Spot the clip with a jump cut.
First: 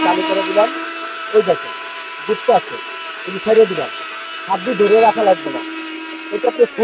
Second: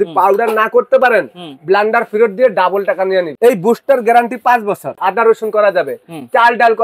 second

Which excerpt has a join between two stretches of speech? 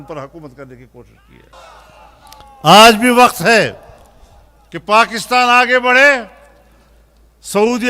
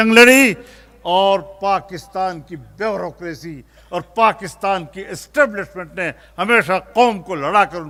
first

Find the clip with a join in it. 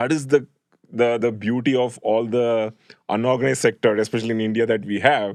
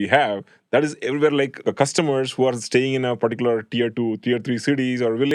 second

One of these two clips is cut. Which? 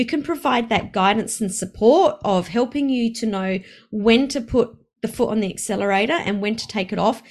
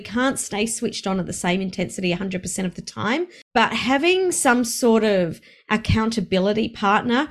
second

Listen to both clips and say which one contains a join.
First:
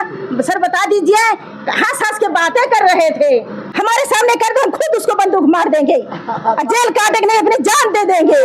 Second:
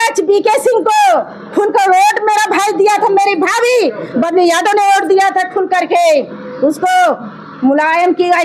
first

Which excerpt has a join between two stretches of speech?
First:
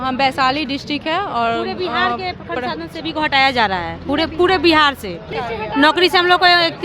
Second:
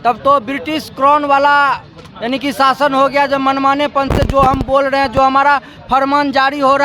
first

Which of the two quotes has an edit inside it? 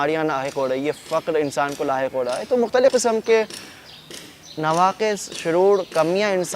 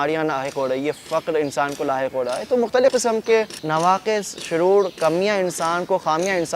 second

